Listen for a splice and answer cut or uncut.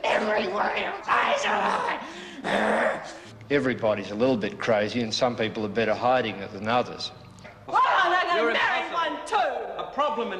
cut